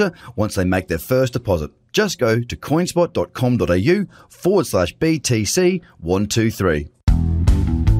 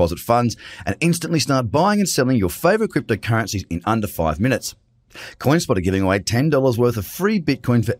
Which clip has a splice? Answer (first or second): first